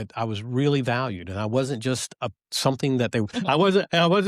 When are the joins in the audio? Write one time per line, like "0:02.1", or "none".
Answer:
0:03.4